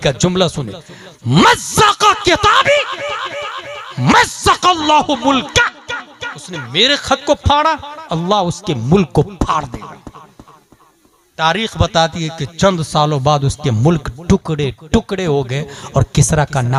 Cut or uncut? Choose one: uncut